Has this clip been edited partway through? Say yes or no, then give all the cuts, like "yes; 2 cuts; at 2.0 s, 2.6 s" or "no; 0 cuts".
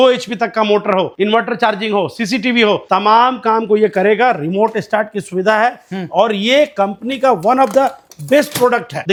no; 0 cuts